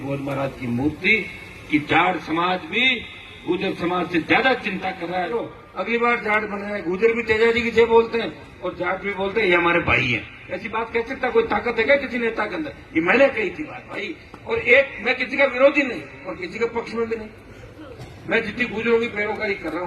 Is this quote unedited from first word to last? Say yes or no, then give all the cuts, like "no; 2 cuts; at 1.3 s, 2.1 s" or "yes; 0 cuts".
no; 1 cut; at 5.5 s